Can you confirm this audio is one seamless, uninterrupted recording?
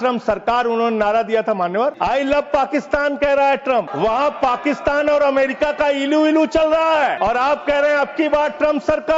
no; 3 cuts; at 2.0 s, 3.9 s, 7.2 s

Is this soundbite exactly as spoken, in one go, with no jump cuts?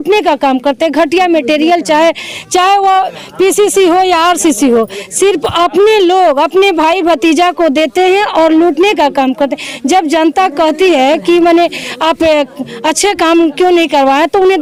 yes; 0 cuts

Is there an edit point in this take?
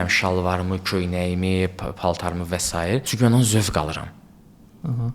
no; 0 cuts

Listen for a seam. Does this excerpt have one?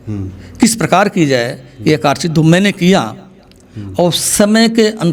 no; 0 cuts

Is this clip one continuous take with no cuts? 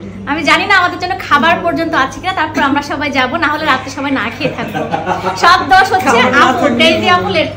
yes; 0 cuts

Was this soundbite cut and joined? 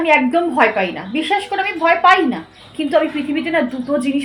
no; 0 cuts

